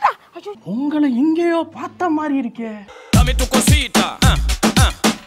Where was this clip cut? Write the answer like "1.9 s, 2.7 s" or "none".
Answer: none